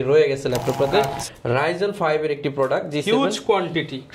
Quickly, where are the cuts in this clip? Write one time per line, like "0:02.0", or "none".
0:01.2